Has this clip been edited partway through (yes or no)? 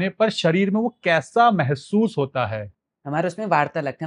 yes